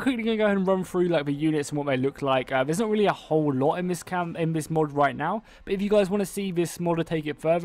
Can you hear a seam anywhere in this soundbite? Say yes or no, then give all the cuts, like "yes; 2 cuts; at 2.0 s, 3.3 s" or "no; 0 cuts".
yes; 1 cut; at 2.9 s